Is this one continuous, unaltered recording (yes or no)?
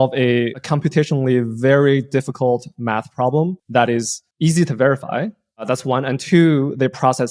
no